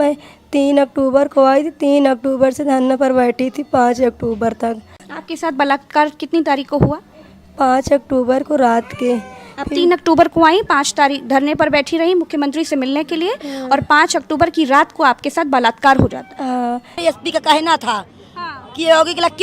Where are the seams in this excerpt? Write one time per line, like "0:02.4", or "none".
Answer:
0:05.1
0:17.0